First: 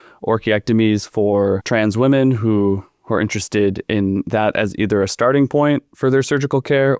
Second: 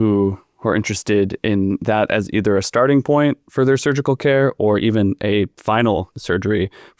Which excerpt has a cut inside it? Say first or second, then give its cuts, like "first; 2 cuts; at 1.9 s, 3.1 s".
second; 2 cuts; at 5.6 s, 6.1 s